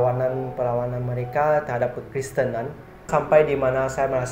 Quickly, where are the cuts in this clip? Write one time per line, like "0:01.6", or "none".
0:03.1